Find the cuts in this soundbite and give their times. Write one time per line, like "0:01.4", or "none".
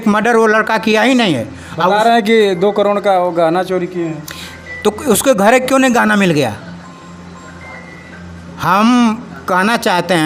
none